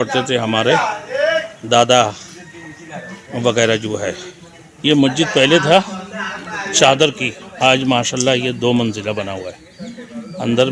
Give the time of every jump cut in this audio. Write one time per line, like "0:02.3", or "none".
0:04.8